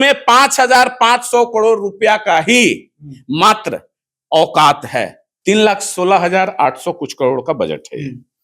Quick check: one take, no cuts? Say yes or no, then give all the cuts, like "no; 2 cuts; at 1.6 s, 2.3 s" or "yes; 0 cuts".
no; 1 cut; at 5.2 s